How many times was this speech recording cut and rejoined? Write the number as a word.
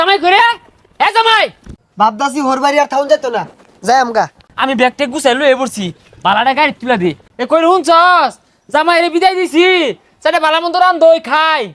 three